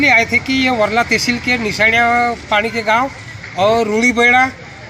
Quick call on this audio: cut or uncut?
uncut